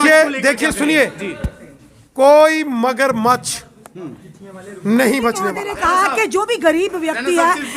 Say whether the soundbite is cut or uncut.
cut